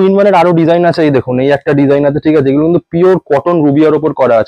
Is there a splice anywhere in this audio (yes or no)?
no